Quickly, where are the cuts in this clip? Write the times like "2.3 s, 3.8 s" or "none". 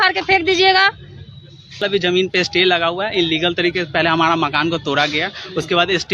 1.8 s